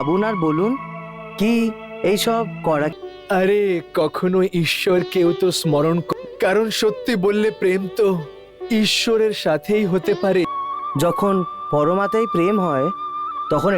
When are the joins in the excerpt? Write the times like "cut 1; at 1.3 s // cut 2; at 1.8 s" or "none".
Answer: cut 1; at 2.9 s // cut 2; at 6.0 s // cut 3; at 10.5 s